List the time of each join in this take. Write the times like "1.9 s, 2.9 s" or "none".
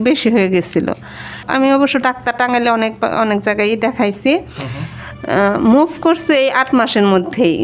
1.4 s